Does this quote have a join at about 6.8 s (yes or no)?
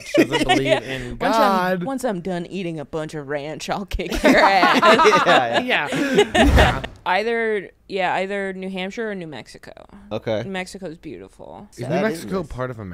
yes